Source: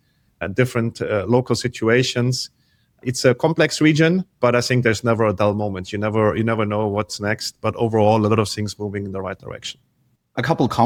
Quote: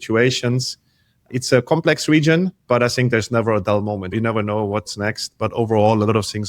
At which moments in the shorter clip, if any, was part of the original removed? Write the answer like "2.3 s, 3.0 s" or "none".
4.1 s